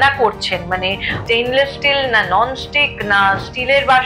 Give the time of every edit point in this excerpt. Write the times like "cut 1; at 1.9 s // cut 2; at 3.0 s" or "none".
cut 1; at 1.1 s